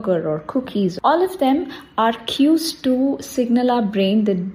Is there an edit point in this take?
yes; 1 cut; at 1.0 s

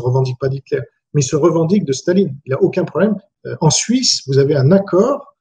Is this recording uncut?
no; 1 cut; at 3.2 s

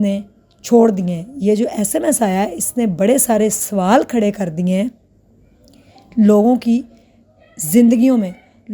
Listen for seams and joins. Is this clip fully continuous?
yes; 0 cuts

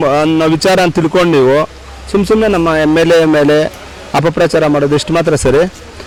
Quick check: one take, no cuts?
yes; 0 cuts

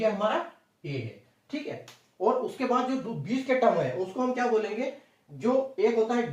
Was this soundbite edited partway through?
no; 0 cuts

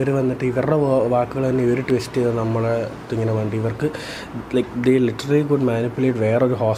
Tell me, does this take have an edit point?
no; 0 cuts

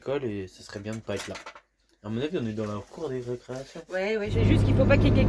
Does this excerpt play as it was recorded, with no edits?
no; 1 cut; at 4.1 s

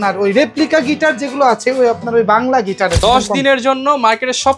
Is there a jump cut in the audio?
yes; 1 cut; at 3.0 s

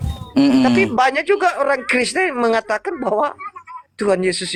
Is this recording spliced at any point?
no; 0 cuts

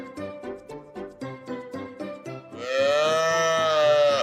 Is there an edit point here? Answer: no; 0 cuts

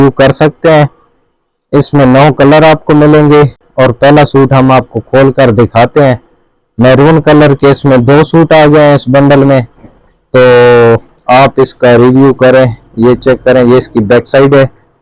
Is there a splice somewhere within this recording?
no; 0 cuts

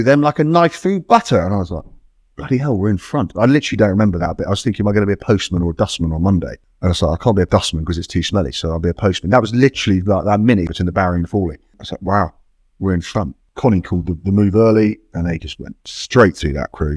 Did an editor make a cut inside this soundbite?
yes; 5 cuts; at 6.6 s, 7.5 s, 10.7 s, 11.9 s, 13.4 s

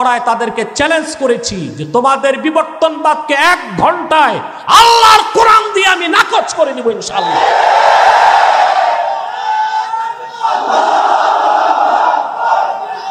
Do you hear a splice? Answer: no; 0 cuts

